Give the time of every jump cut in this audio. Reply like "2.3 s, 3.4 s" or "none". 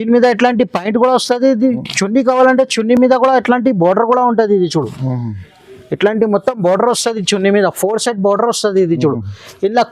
none